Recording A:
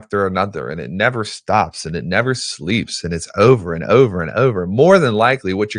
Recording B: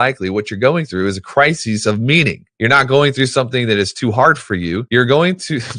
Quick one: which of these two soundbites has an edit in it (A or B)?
B